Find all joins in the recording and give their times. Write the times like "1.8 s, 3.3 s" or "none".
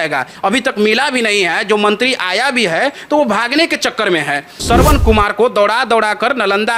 4.6 s